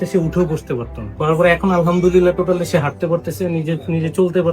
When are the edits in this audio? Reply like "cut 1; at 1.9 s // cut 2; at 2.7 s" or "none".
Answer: cut 1; at 1.1 s